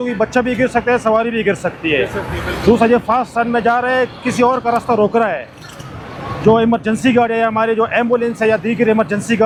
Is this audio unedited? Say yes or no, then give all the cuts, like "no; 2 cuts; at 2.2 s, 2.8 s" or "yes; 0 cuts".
yes; 0 cuts